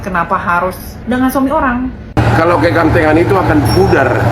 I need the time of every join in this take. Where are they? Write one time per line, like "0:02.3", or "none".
0:02.2